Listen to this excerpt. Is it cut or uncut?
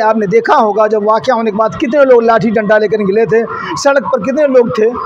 uncut